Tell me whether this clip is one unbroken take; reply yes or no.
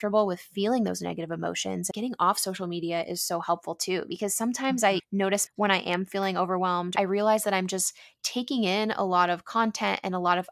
no